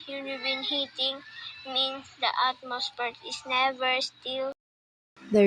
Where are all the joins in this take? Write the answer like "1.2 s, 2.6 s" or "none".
none